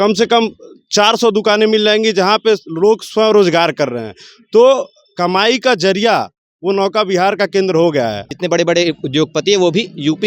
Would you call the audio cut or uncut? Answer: cut